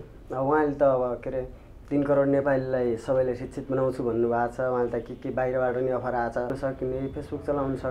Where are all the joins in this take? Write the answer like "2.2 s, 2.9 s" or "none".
6.6 s